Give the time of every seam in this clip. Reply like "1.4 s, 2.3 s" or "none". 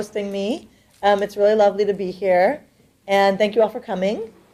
none